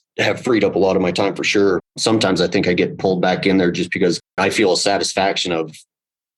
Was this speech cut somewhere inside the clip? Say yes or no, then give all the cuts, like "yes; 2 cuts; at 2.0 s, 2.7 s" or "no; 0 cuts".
yes; 2 cuts; at 1.9 s, 4.4 s